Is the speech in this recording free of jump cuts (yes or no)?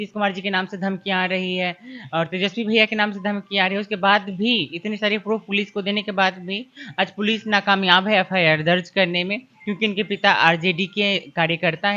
yes